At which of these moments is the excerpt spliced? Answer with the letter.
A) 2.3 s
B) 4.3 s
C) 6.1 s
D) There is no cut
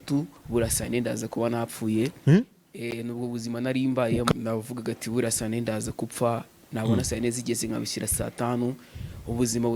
B